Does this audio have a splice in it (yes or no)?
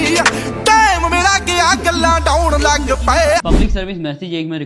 no